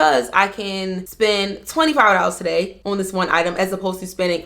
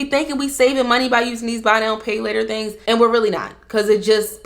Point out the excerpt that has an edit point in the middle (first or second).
first